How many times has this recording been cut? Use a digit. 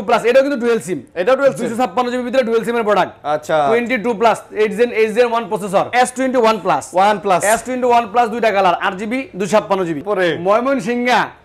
2